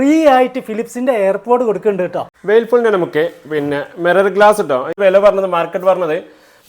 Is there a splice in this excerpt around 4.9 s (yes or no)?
yes